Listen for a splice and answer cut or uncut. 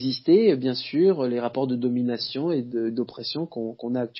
uncut